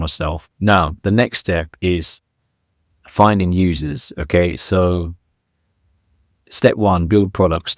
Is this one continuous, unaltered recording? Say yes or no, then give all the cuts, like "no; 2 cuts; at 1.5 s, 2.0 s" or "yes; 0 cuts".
no; 1 cut; at 4.1 s